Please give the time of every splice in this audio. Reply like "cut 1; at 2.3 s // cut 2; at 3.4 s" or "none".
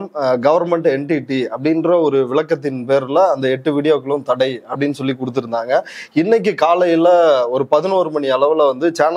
none